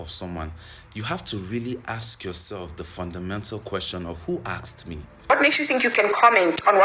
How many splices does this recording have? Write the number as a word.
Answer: one